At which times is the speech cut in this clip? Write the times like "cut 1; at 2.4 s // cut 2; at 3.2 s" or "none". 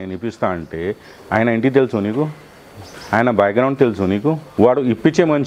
cut 1; at 4.4 s